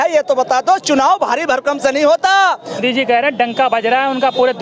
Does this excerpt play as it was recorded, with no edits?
no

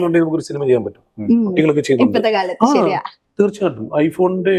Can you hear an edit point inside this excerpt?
no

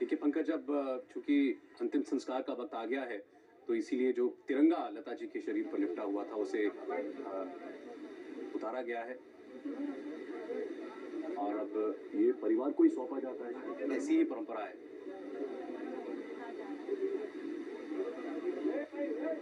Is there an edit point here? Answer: no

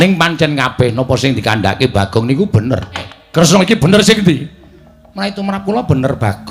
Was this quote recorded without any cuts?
no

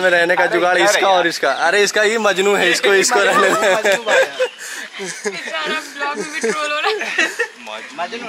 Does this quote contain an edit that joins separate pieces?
no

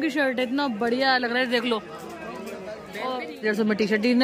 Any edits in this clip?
yes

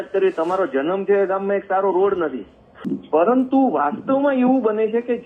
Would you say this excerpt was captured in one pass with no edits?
no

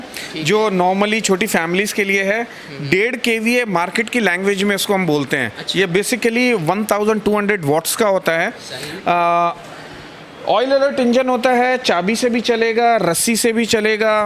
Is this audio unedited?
yes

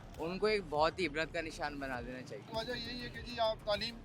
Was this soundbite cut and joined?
yes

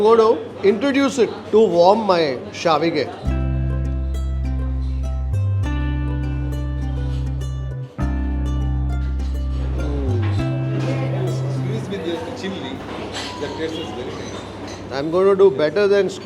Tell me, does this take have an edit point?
no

